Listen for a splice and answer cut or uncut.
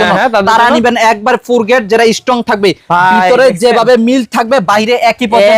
uncut